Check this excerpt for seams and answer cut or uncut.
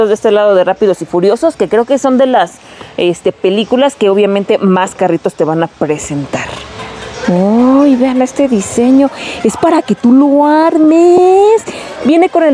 uncut